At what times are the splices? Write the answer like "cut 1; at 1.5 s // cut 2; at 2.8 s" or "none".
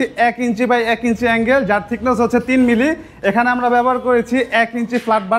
none